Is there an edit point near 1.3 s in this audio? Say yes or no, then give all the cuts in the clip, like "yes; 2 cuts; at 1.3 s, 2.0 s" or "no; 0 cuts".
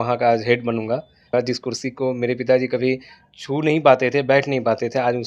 yes; 1 cut; at 1.3 s